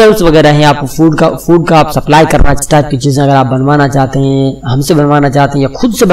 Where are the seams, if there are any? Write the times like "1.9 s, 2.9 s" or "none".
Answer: 2.5 s

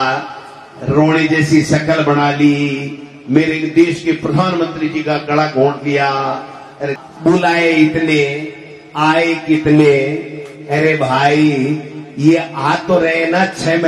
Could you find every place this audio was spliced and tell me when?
6.9 s

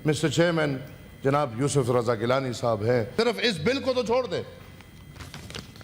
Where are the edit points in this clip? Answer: 3.1 s

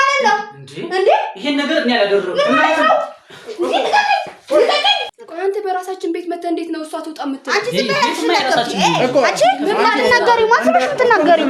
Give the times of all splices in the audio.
5.1 s

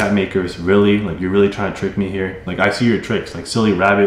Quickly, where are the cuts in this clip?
2.4 s

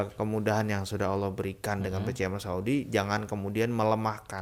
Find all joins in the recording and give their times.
none

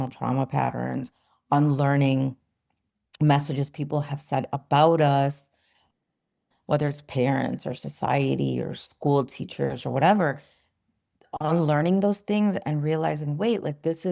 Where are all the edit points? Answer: none

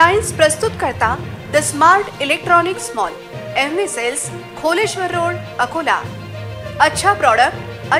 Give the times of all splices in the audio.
none

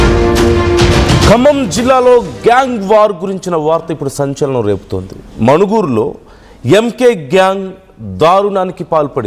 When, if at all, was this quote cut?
1.2 s

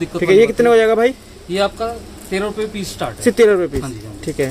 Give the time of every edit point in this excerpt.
none

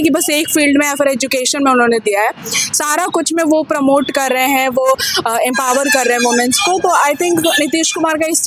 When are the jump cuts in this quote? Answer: none

